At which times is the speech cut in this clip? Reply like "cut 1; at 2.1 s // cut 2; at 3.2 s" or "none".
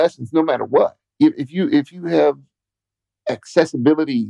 cut 1; at 1.0 s